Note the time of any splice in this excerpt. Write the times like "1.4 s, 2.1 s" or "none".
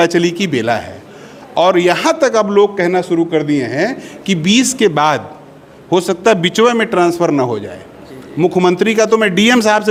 none